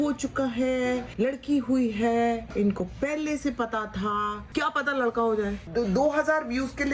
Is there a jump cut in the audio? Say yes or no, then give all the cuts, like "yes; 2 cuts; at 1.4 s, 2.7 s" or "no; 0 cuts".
yes; 2 cuts; at 4.4 s, 5.6 s